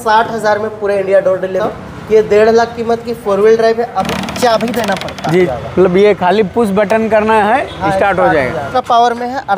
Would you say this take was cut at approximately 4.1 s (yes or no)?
yes